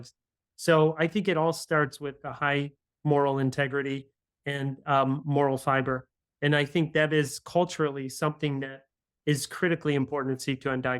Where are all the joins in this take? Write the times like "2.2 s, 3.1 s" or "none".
none